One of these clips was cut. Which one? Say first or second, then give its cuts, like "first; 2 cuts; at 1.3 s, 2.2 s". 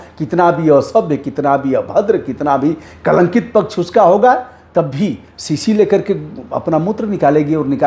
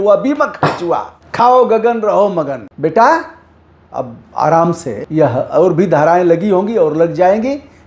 second; 3 cuts; at 1.2 s, 2.6 s, 4.9 s